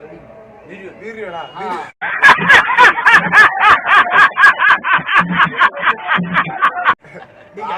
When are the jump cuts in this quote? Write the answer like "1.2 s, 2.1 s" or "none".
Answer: 2.1 s, 5.7 s, 7.0 s